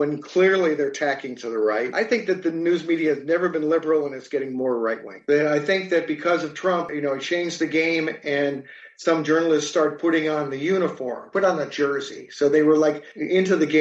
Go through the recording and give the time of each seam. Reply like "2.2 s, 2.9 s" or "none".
1.9 s, 5.1 s